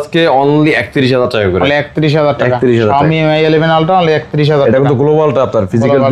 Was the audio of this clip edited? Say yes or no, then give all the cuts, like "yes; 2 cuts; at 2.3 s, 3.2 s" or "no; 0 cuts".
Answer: no; 0 cuts